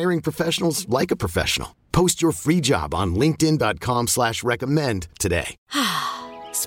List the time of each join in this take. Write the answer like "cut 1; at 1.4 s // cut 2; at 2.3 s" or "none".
cut 1; at 5.5 s

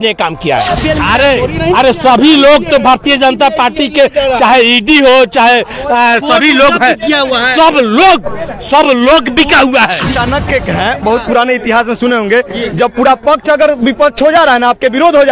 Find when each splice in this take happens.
cut 1; at 0.8 s // cut 2; at 10.1 s

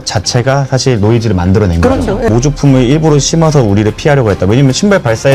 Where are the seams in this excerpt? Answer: cut 1; at 2.3 s

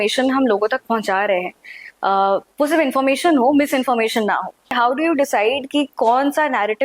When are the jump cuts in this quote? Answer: cut 1; at 4.7 s

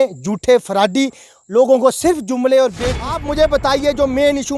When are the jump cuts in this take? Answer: cut 1; at 3.2 s

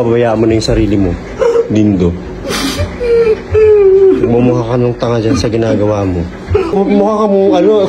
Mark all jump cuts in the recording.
cut 1; at 6.7 s

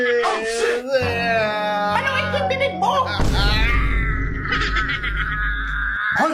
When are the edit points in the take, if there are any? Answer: none

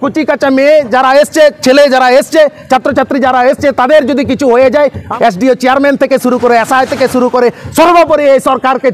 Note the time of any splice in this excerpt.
cut 1; at 5.1 s

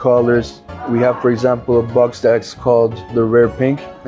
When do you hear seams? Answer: cut 1; at 3.1 s

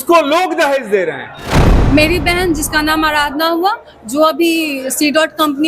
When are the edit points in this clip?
cut 1; at 1.5 s

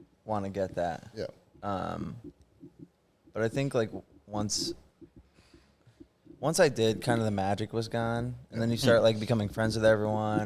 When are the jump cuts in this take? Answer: none

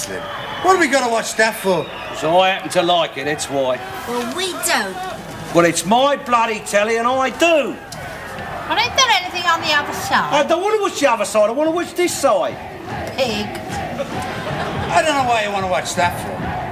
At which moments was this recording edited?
cut 1; at 7.4 s

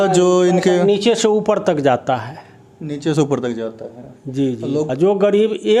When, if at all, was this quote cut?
cut 1; at 4.9 s

